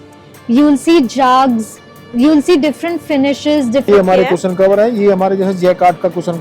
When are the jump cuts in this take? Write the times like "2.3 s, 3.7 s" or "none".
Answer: 3.9 s